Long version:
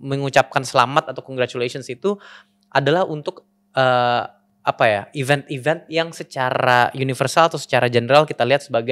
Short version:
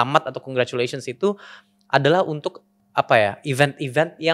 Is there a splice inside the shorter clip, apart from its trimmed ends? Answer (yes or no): yes